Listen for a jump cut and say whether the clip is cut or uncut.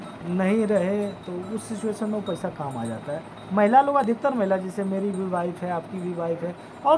uncut